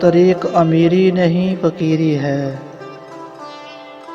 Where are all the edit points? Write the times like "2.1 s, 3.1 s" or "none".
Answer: 2.7 s